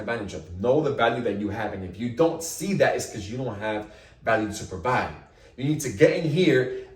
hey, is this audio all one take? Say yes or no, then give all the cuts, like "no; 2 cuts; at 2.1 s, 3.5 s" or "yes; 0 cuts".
yes; 0 cuts